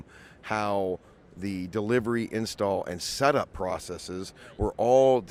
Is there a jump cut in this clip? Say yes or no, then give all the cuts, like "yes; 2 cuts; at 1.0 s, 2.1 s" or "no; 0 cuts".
no; 0 cuts